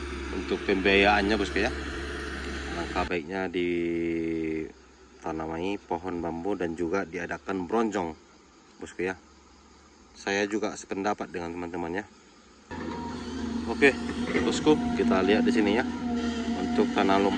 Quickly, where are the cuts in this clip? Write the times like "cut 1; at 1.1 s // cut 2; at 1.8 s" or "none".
cut 1; at 2.7 s // cut 2; at 12.8 s